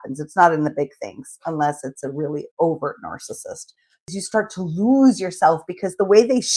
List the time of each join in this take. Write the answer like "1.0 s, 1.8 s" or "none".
4.1 s